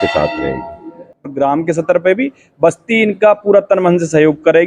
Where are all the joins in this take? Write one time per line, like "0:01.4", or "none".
0:01.2